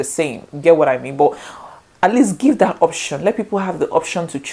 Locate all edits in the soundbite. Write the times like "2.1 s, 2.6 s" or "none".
none